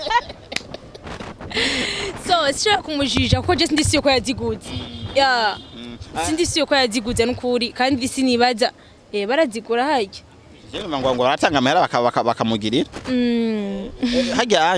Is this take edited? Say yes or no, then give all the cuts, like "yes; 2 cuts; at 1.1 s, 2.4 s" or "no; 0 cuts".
no; 0 cuts